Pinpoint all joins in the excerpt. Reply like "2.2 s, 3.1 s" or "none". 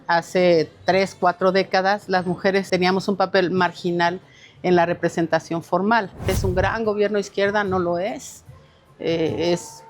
2.7 s, 6.3 s